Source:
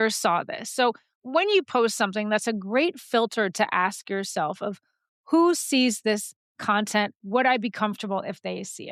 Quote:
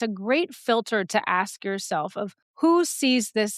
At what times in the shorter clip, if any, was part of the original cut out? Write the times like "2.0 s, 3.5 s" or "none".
2.4 s